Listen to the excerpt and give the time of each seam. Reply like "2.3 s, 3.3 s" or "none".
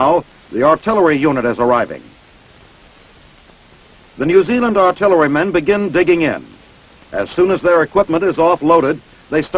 none